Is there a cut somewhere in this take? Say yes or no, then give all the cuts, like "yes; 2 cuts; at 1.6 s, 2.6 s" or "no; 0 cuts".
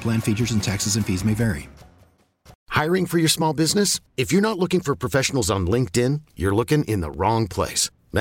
yes; 1 cut; at 2.6 s